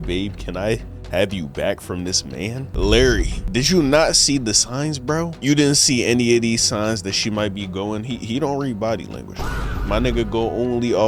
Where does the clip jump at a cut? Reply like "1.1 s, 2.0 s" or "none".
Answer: 2.6 s, 3.3 s, 5.3 s